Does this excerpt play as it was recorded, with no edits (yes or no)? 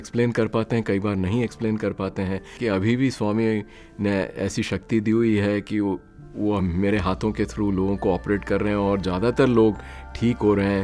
no